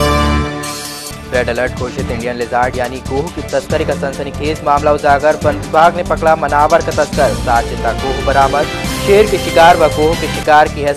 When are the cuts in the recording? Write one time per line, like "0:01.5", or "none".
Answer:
0:00.9